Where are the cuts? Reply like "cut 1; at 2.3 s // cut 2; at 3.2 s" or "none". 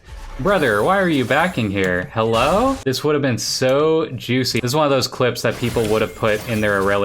cut 1; at 2.8 s // cut 2; at 4.6 s